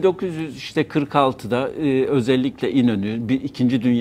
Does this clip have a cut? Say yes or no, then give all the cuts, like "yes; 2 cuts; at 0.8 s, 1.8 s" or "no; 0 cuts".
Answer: no; 0 cuts